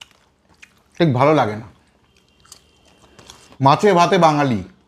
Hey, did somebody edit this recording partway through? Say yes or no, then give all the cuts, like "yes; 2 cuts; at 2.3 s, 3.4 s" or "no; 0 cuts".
yes; 1 cut; at 3.6 s